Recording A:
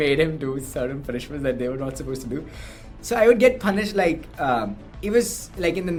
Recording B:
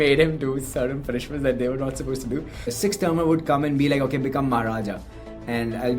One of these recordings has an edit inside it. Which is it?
B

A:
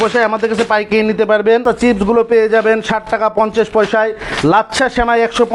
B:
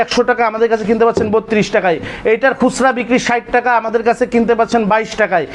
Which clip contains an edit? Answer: A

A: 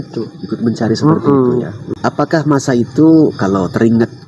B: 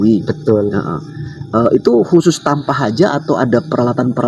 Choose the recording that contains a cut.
A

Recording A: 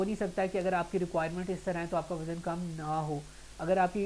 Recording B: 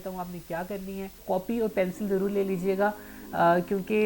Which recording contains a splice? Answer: B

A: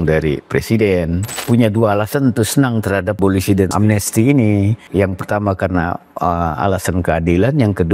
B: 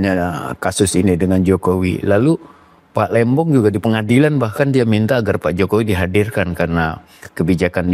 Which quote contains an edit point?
A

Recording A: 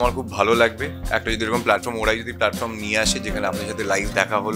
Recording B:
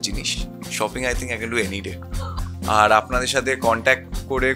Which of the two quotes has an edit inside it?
B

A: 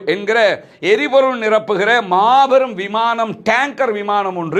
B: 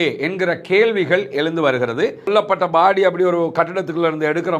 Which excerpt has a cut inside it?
B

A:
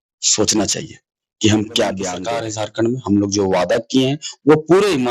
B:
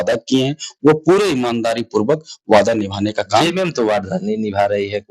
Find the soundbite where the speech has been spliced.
A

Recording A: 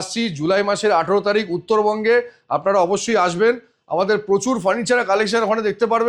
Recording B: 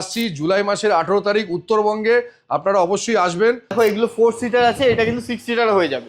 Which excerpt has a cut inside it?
B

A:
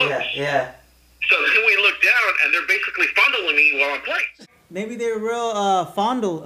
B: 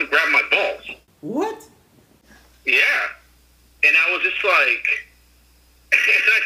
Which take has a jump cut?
A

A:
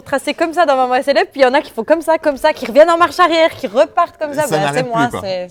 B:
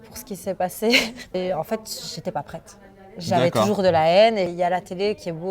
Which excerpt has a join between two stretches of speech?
B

